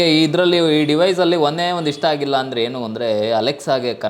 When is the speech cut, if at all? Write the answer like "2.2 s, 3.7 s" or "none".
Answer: none